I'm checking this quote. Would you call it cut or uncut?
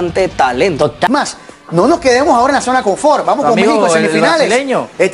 cut